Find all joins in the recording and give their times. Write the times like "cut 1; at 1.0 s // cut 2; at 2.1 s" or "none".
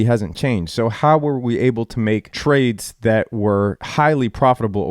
cut 1; at 2.3 s // cut 2; at 3.8 s